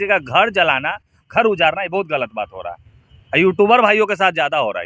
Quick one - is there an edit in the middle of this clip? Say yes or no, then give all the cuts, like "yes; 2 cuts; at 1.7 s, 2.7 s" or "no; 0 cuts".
no; 0 cuts